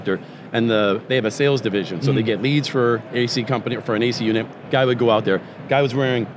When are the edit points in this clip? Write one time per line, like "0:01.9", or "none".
none